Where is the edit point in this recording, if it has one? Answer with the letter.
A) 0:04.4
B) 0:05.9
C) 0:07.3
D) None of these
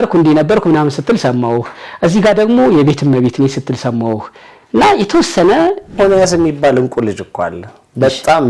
B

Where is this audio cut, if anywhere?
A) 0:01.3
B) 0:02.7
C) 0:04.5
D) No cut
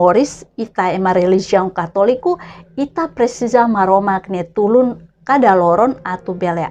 D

